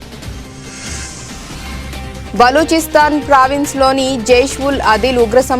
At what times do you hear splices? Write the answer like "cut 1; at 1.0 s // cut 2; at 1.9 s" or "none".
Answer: cut 1; at 1.5 s